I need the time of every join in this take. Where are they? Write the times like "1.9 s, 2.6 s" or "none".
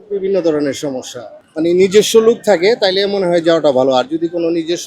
1.4 s